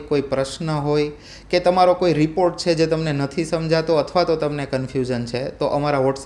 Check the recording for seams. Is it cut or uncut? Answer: uncut